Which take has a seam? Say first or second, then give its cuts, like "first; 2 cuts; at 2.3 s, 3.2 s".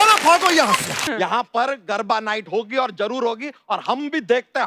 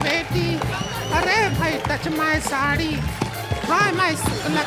first; 1 cut; at 1.0 s